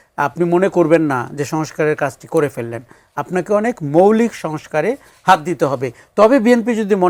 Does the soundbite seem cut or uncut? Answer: uncut